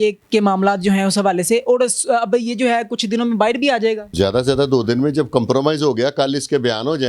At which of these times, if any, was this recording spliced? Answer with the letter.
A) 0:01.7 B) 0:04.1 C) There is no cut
C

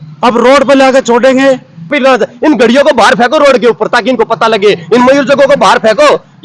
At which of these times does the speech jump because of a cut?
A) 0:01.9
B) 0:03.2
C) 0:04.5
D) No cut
A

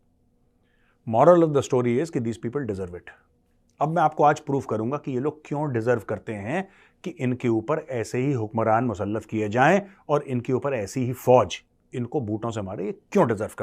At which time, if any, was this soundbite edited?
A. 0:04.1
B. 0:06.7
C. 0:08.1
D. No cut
D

